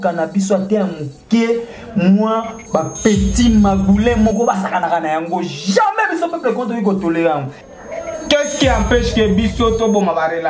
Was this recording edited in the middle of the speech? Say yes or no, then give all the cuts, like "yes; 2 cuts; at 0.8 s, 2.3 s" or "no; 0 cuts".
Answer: yes; 1 cut; at 7.6 s